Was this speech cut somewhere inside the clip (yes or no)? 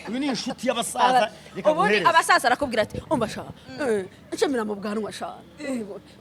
no